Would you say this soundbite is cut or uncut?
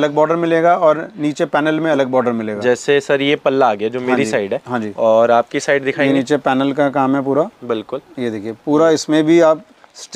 uncut